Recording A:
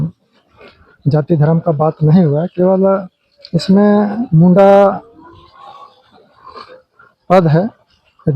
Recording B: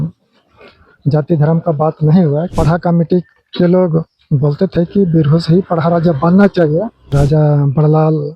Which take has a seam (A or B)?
B